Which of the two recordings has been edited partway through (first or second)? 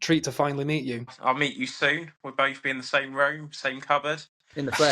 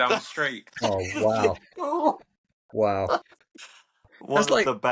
first